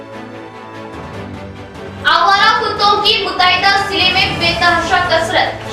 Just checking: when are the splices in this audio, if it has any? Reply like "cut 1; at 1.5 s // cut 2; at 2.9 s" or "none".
cut 1; at 1.4 s